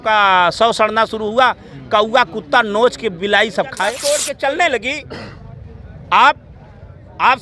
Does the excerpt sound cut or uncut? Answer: cut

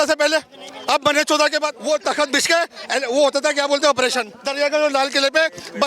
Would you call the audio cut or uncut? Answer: cut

